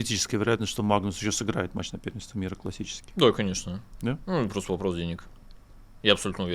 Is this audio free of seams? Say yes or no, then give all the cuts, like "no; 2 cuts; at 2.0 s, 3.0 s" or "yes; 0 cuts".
yes; 0 cuts